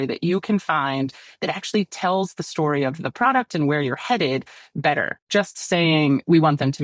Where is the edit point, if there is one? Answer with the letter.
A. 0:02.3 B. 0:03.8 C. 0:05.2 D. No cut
C